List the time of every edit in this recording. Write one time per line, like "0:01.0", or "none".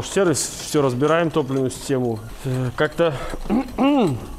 0:02.3